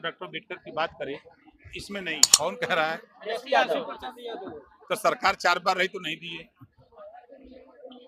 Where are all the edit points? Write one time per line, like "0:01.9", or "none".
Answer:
0:02.3